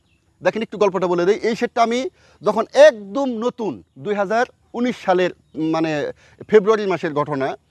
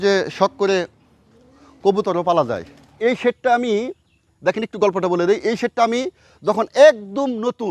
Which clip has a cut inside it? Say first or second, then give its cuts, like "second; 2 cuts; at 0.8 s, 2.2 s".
second; 1 cut; at 3.0 s